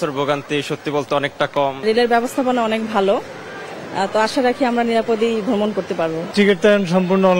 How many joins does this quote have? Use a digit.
2